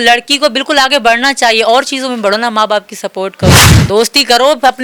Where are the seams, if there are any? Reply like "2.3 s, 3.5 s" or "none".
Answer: 3.6 s